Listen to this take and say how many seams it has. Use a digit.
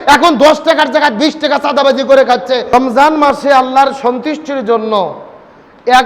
0